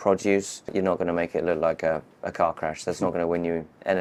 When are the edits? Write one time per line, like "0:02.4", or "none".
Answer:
none